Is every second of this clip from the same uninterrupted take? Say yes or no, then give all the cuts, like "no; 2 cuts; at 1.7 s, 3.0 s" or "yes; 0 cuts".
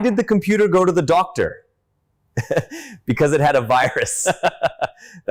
yes; 0 cuts